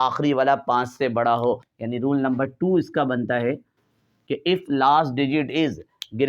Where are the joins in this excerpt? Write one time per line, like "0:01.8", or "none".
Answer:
0:01.7